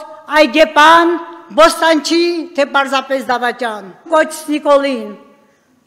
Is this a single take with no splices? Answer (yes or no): no